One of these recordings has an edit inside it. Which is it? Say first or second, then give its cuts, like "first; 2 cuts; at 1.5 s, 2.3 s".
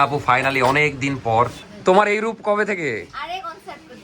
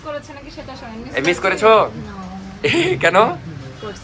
first; 1 cut; at 1.6 s